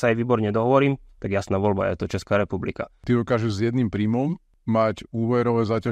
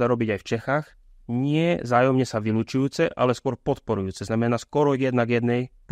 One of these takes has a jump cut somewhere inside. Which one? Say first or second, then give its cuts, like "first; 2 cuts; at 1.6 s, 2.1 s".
first; 2 cuts; at 3.0 s, 4.5 s